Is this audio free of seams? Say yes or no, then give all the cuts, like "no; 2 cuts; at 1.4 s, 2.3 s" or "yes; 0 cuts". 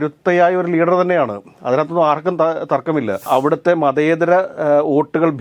no; 1 cut; at 3.2 s